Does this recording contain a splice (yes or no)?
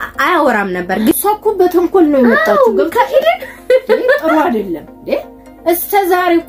yes